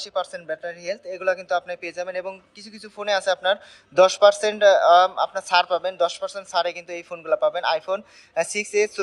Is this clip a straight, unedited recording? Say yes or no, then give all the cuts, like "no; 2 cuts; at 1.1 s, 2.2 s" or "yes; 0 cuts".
yes; 0 cuts